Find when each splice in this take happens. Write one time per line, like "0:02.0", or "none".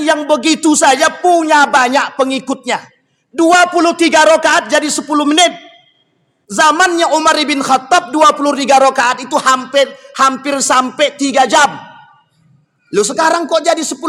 none

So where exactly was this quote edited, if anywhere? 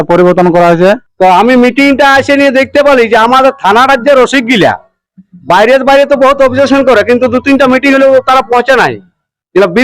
0:01.0

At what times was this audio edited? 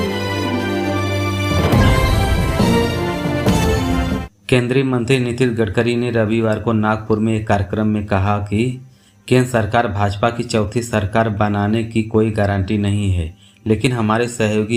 none

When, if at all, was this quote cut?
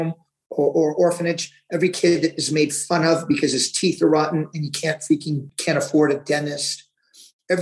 0:05.5

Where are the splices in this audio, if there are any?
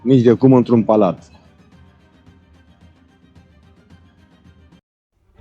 none

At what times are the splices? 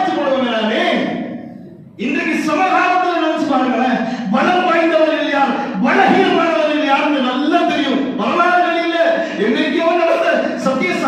none

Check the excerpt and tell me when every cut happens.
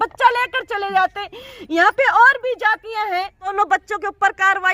0:03.5

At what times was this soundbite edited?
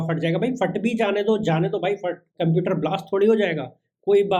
0:02.2

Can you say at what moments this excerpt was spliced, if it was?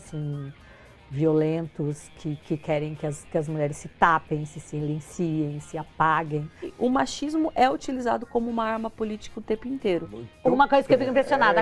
0:06.7
0:10.2

